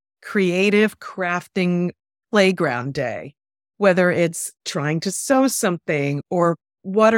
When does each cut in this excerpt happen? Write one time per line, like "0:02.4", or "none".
0:04.5

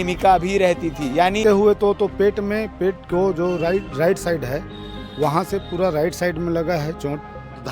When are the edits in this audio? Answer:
0:01.4

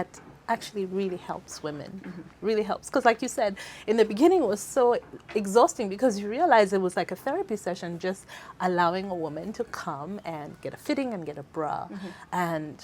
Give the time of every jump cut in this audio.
none

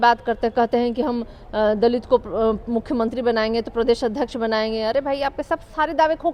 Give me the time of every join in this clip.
none

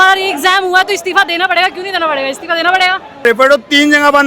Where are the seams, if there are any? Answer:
0:03.2

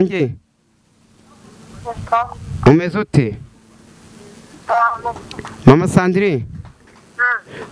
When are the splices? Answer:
none

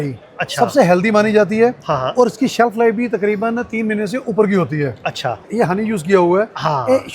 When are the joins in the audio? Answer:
0:05.5

